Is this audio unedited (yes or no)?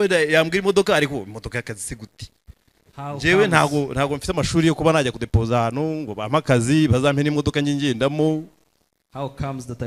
yes